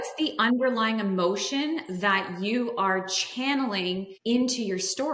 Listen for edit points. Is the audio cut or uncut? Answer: cut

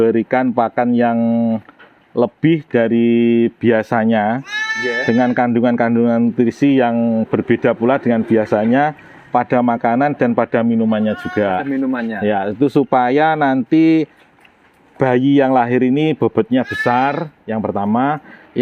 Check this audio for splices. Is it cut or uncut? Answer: uncut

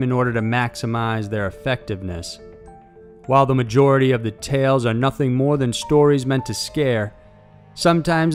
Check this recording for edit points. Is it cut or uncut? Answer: uncut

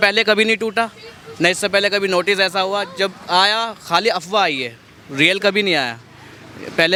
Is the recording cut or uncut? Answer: uncut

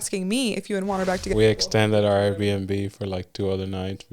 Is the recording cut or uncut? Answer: cut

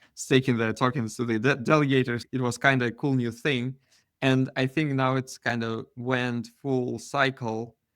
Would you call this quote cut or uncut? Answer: cut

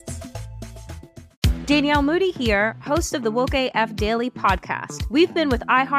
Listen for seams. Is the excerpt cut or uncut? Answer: cut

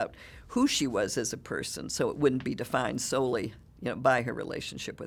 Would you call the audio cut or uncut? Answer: uncut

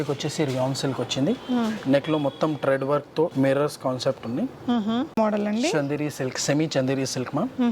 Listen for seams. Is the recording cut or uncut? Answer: cut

